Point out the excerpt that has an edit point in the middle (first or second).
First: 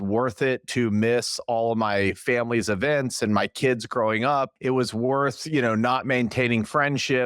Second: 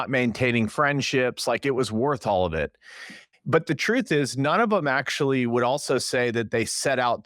first